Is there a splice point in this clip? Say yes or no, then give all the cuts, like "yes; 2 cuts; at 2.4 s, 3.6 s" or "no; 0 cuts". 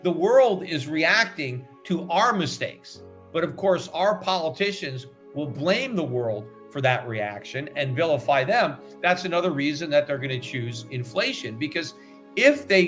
no; 0 cuts